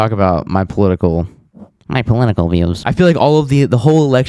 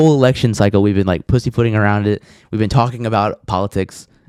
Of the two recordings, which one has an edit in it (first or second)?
first